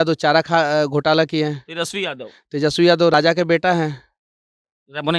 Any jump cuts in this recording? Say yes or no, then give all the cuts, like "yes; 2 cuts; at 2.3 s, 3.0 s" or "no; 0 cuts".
no; 0 cuts